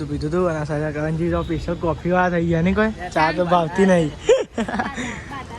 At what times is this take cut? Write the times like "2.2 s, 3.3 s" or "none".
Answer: none